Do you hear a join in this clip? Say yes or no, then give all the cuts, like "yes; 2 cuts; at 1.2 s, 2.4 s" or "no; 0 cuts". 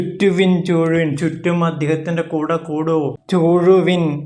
yes; 1 cut; at 3.2 s